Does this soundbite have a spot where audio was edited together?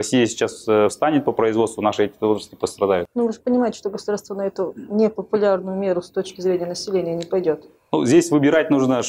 yes; 1 cut; at 3.1 s

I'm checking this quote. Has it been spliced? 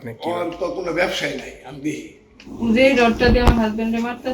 yes; 1 cut; at 2.4 s

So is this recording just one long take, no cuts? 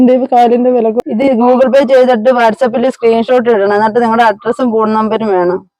no; 1 cut; at 1.0 s

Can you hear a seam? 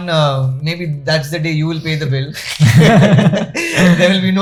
no; 0 cuts

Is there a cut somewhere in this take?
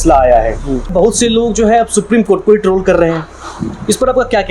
yes; 1 cut; at 0.9 s

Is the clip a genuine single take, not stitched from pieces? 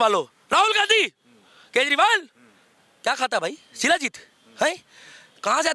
yes; 0 cuts

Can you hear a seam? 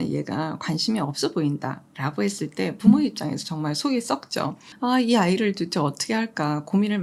no; 0 cuts

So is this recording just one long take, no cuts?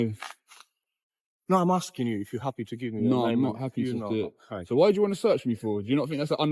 yes; 0 cuts

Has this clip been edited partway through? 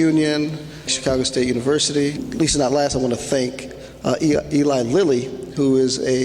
yes; 2 cuts; at 0.9 s, 2.2 s

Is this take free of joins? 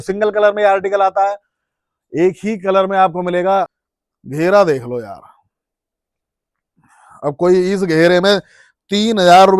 no; 1 cut; at 3.8 s

